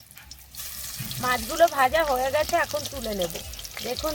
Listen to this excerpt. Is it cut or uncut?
cut